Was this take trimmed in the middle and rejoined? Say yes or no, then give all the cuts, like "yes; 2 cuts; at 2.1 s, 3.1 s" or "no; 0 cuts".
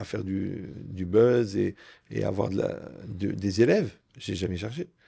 no; 0 cuts